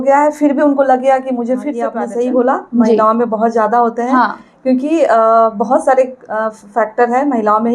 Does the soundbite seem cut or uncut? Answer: cut